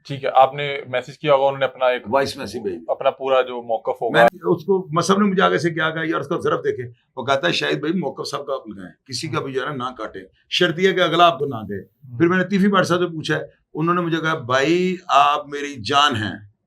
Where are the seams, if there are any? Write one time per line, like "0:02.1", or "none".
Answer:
0:04.3